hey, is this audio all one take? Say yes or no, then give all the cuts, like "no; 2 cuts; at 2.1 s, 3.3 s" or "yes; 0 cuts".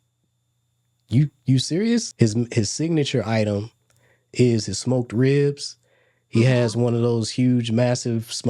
no; 1 cut; at 2.1 s